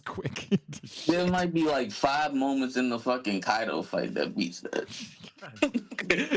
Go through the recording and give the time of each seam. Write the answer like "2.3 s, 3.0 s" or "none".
none